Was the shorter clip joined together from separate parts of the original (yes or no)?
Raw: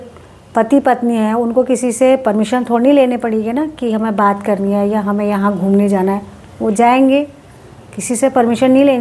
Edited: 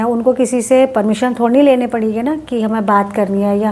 no